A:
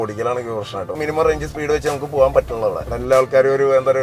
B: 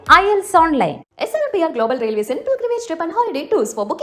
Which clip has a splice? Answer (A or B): A